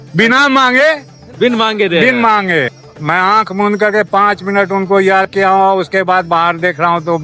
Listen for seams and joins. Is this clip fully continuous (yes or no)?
no